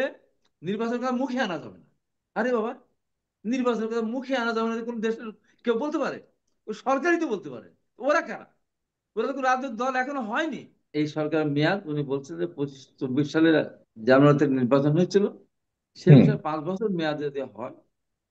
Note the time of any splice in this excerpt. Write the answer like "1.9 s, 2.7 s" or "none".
10.9 s